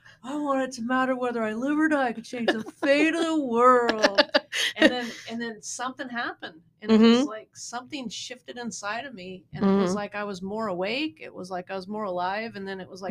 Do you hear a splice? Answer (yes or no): no